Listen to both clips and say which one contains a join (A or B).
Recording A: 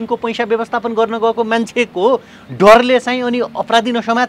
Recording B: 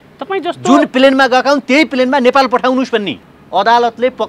B